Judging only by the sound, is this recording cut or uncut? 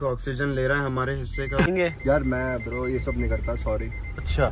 cut